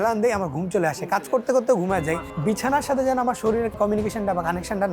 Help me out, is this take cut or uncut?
cut